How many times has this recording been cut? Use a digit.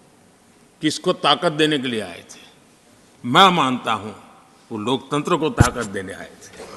0